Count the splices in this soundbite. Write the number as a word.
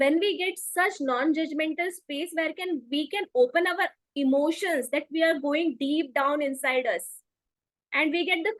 zero